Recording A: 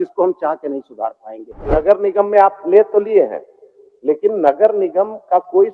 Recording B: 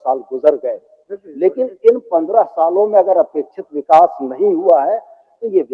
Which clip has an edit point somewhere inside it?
A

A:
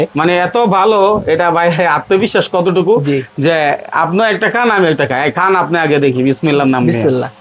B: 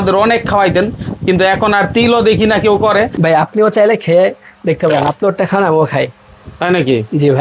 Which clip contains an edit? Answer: B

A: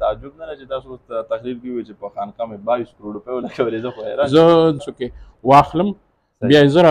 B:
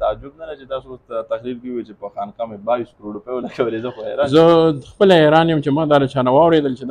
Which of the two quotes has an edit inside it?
A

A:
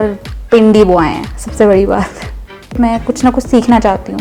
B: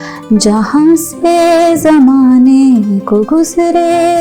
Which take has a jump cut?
A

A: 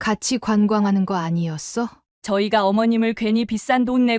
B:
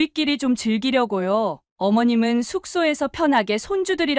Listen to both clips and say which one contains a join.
A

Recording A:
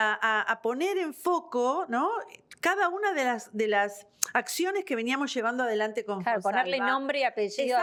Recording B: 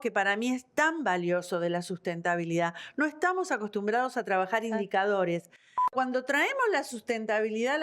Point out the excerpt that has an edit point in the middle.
B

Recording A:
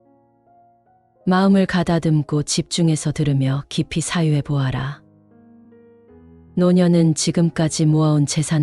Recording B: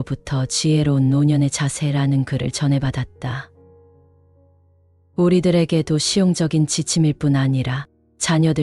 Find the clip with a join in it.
A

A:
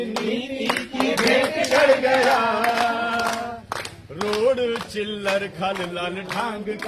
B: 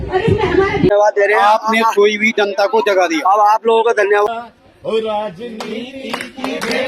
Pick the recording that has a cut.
B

